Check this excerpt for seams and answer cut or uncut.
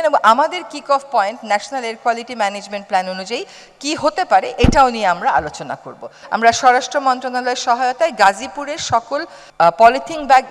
cut